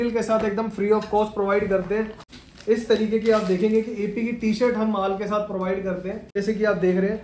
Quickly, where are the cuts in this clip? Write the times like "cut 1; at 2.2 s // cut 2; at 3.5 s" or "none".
cut 1; at 2.2 s // cut 2; at 6.2 s